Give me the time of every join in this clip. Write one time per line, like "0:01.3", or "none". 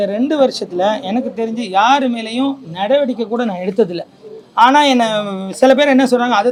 none